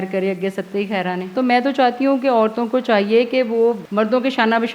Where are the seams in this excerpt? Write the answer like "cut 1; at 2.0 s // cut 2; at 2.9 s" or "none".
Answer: cut 1; at 1.3 s // cut 2; at 3.8 s